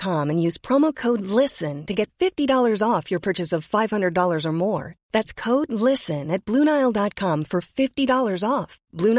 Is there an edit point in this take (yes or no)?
no